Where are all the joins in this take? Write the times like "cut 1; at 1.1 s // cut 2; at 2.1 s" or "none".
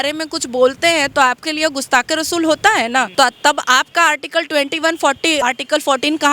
cut 1; at 3.1 s // cut 2; at 5.4 s